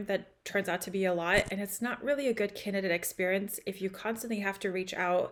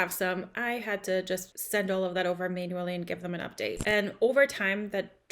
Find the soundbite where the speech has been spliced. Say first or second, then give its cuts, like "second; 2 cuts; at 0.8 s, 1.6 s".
second; 2 cuts; at 1.5 s, 3.8 s